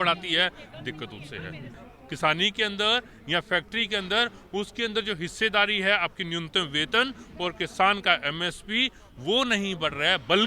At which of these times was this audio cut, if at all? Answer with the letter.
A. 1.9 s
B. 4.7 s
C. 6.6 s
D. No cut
A